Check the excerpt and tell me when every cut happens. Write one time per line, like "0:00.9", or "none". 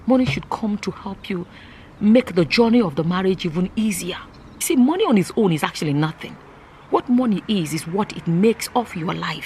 0:04.5